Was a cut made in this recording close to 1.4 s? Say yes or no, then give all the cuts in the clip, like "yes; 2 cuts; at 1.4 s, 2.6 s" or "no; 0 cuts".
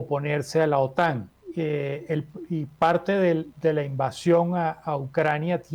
yes; 1 cut; at 1.4 s